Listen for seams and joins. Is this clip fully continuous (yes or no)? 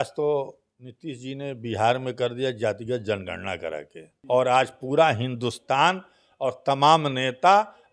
no